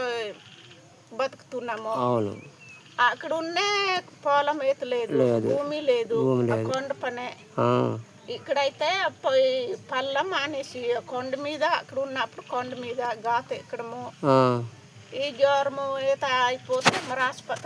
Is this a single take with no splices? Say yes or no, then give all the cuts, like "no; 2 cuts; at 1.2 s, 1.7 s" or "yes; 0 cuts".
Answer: yes; 0 cuts